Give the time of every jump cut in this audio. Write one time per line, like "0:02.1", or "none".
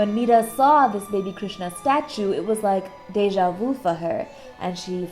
none

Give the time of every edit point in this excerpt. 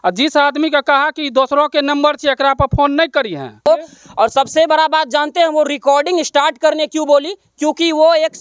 0:03.6

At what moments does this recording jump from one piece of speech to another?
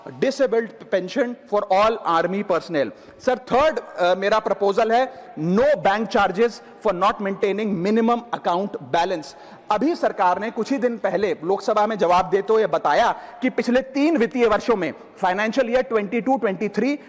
none

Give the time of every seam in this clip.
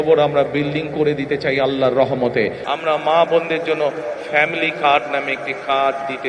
0:02.6

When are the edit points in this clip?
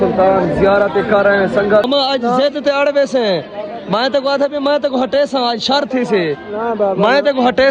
0:01.9

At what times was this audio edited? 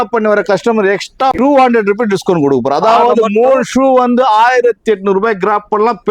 0:01.3

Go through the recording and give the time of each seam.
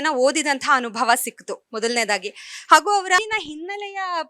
0:03.2

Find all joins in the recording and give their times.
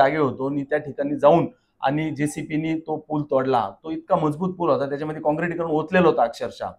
none

